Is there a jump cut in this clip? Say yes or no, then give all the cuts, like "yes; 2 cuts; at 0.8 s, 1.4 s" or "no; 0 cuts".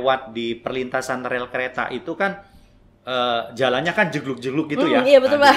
no; 0 cuts